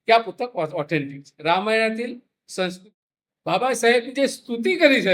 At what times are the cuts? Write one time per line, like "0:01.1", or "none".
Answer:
0:02.8